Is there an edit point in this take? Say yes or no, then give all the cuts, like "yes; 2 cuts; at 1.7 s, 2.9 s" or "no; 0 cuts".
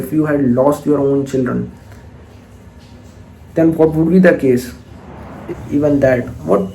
yes; 1 cut; at 5.5 s